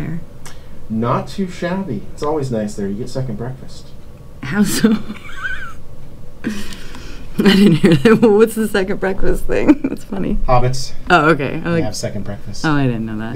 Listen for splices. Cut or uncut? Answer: uncut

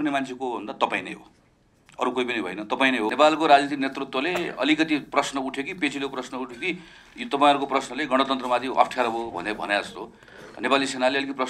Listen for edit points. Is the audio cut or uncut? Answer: cut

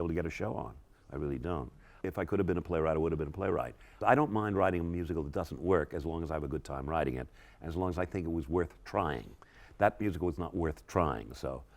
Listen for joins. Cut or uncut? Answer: cut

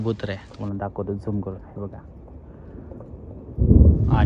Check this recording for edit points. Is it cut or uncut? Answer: uncut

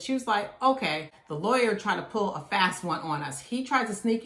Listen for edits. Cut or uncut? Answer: cut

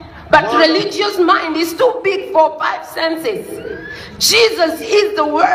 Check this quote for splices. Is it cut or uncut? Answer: uncut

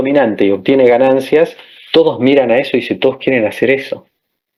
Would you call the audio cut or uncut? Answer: uncut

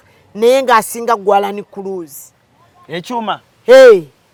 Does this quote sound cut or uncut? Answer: uncut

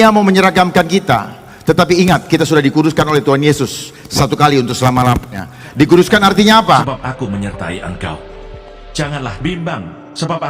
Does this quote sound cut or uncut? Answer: cut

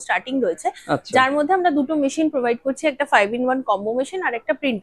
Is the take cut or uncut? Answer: uncut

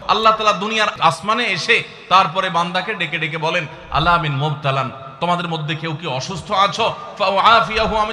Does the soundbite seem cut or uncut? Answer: cut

